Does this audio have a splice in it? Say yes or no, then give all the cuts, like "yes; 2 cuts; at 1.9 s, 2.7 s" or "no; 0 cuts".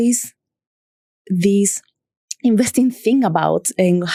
no; 0 cuts